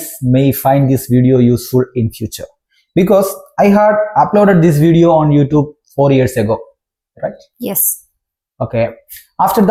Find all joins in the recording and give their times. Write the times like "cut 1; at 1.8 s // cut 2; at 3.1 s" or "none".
none